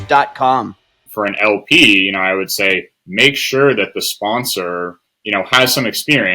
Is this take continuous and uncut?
no; 1 cut; at 1.0 s

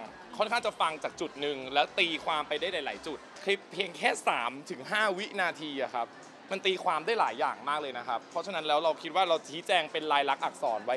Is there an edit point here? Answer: yes; 1 cut; at 3.4 s

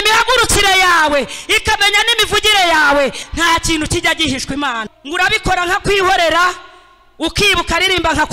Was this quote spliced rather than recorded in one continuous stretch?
yes; 2 cuts; at 3.2 s, 4.9 s

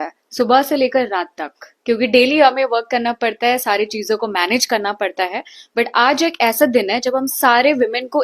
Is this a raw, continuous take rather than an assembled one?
yes; 0 cuts

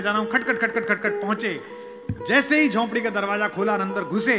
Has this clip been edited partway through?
no; 0 cuts

